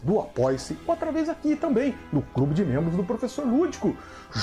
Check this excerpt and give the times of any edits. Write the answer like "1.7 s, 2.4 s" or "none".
none